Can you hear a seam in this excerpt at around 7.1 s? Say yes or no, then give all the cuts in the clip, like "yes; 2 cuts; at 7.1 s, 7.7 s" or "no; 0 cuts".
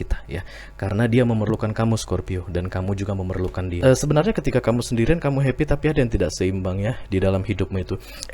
no; 1 cut; at 3.7 s